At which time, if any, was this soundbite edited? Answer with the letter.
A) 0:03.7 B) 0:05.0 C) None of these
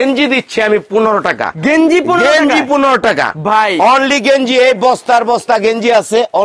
C